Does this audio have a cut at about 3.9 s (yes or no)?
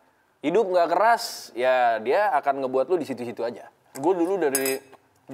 yes